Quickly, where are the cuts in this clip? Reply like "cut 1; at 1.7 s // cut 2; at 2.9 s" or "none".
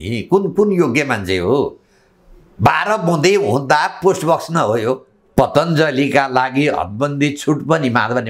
cut 1; at 5.1 s